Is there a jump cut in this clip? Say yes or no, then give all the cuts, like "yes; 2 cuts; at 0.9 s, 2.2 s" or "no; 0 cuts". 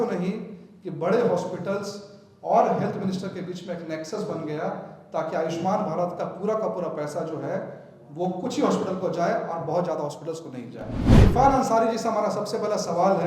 yes; 1 cut; at 11.0 s